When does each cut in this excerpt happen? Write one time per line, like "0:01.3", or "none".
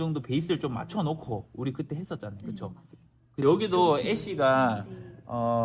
0:03.4